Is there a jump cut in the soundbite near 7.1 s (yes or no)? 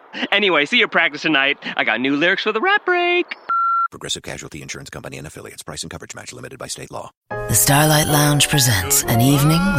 yes